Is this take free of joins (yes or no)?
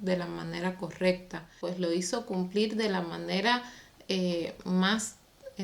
no